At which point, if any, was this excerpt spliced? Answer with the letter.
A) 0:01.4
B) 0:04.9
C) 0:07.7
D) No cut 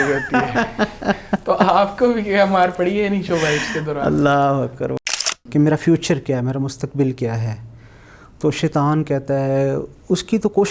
B